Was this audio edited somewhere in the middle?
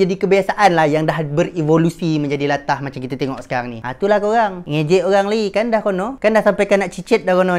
no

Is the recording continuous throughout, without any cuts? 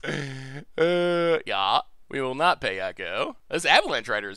no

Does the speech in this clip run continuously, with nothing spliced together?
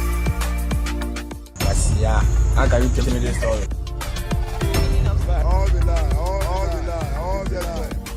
yes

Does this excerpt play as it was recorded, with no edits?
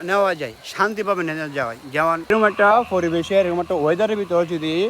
no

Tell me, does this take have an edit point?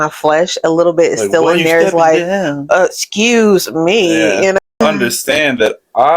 yes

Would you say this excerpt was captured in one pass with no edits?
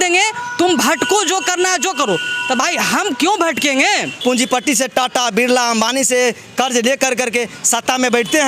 no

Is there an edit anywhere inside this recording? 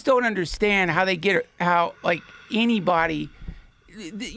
no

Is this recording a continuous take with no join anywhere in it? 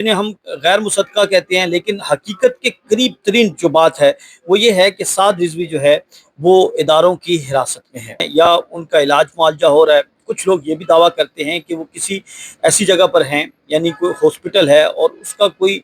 no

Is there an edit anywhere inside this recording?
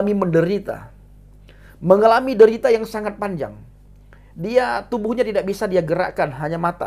no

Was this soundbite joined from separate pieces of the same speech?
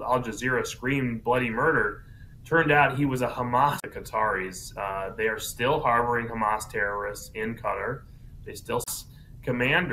no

